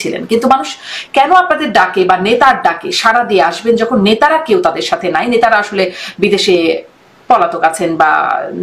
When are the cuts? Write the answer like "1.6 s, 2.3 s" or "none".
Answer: none

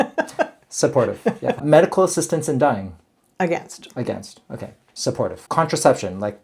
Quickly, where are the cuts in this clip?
1.5 s, 5.4 s

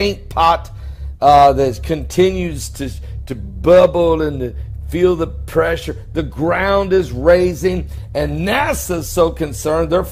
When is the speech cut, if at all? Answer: 2.0 s

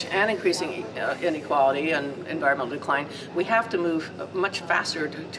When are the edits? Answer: none

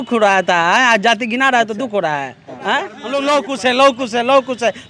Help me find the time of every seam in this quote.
3.0 s

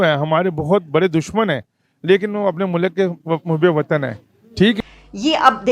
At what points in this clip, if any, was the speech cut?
4.8 s

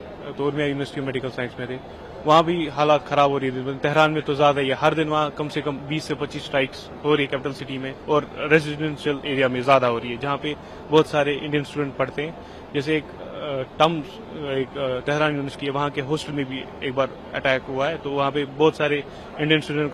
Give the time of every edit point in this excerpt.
none

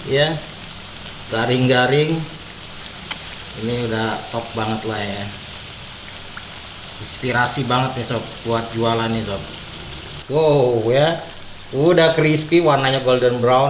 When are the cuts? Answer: none

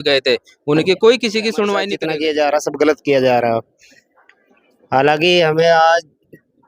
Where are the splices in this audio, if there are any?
2.0 s

